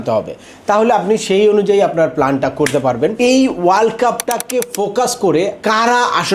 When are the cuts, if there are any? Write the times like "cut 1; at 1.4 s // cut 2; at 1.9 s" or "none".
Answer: cut 1; at 3.1 s // cut 2; at 4.3 s // cut 3; at 5.6 s